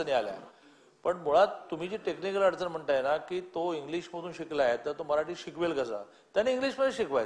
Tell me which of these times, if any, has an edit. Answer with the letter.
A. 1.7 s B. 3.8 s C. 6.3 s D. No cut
D